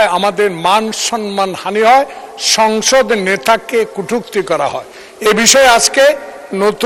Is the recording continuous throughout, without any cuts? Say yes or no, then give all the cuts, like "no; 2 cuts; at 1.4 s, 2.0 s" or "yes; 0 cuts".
yes; 0 cuts